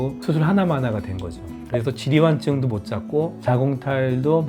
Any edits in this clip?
no; 0 cuts

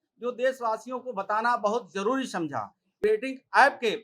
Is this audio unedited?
no; 1 cut; at 3.0 s

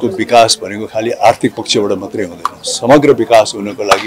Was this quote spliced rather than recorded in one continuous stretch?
no; 0 cuts

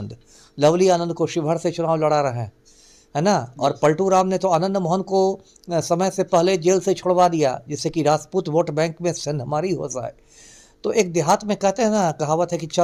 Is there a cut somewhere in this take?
no; 0 cuts

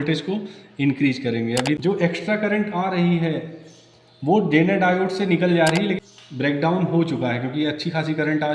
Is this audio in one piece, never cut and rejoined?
no; 2 cuts; at 1.8 s, 6.0 s

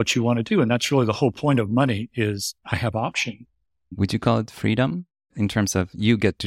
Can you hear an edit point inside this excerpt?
yes; 3 cuts; at 2.5 s, 3.9 s, 5.3 s

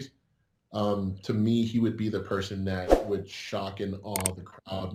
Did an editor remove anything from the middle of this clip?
no; 0 cuts

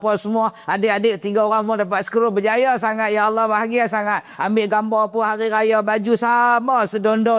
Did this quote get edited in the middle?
no; 0 cuts

